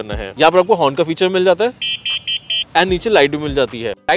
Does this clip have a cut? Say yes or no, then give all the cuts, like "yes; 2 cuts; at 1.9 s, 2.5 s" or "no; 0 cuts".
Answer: no; 0 cuts